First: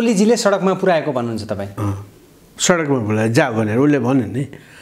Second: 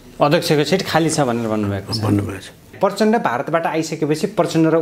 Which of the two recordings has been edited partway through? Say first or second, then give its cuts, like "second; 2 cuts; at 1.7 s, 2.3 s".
second; 1 cut; at 2.7 s